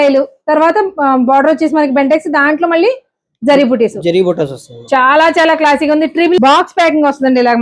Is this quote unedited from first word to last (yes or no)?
no